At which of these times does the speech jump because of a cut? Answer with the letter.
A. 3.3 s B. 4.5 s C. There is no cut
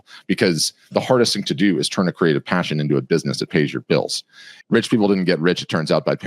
B